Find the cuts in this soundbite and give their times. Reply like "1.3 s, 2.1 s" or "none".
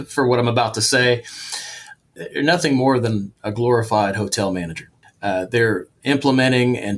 1.7 s